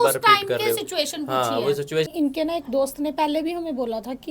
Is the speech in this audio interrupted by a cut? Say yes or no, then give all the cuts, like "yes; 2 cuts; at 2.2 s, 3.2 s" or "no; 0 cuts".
yes; 1 cut; at 2.1 s